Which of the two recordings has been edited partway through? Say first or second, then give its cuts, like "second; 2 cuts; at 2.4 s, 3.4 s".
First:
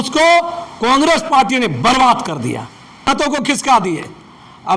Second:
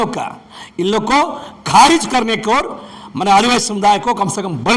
first; 1 cut; at 3.1 s